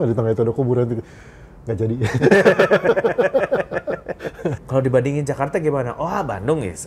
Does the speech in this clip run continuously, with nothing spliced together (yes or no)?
no